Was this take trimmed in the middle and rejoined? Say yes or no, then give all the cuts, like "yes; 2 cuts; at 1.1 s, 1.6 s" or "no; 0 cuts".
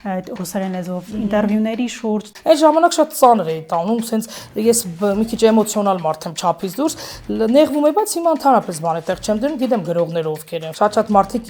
yes; 2 cuts; at 2.3 s, 10.6 s